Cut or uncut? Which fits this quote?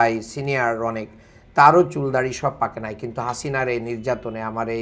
uncut